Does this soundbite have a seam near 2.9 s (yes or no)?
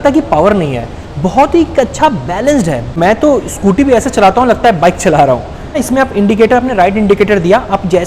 yes